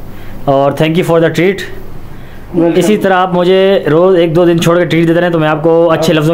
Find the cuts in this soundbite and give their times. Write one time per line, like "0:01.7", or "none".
none